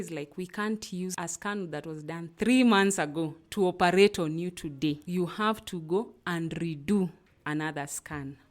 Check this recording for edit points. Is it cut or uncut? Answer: cut